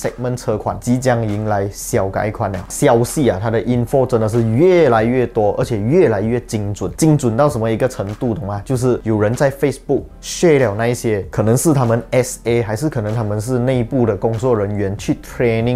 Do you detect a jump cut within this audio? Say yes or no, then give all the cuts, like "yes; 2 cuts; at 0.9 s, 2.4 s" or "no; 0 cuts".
yes; 1 cut; at 2.7 s